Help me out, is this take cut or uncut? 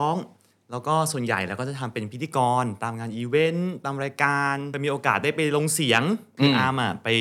cut